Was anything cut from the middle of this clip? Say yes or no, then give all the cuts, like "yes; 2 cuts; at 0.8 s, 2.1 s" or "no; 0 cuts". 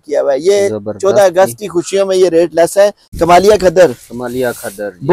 yes; 1 cut; at 3.0 s